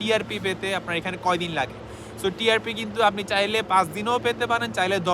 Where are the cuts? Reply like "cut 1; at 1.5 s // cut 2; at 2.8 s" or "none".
none